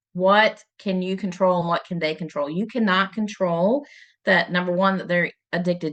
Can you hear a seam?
no; 0 cuts

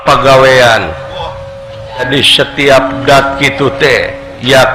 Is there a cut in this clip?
yes; 1 cut; at 2.1 s

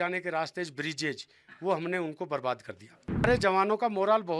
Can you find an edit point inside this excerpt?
yes; 1 cut; at 3.3 s

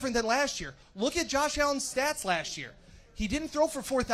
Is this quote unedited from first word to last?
yes; 0 cuts

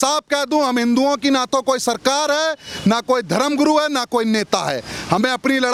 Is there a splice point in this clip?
no; 0 cuts

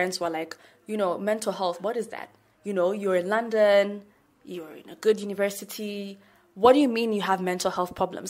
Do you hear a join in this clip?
no; 0 cuts

